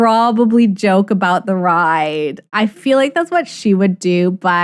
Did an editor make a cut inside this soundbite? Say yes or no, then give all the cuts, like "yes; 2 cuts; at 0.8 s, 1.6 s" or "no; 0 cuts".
no; 0 cuts